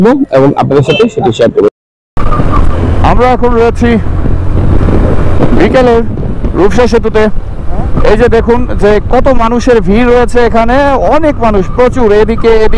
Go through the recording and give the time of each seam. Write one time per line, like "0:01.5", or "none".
0:01.8